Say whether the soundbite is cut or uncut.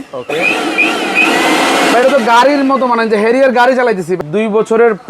cut